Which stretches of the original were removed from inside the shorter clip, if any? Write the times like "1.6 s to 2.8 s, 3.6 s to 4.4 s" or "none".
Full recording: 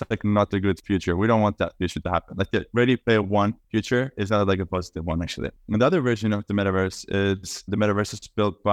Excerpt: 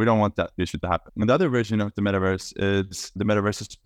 2.3 s to 5.6 s